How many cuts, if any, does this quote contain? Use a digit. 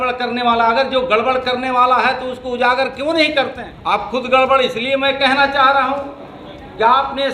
1